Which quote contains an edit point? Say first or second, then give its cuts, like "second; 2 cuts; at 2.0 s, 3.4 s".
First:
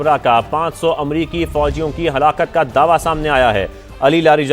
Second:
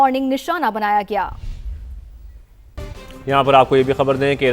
second; 1 cut; at 2.8 s